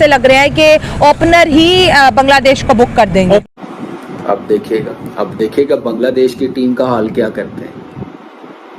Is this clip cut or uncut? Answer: cut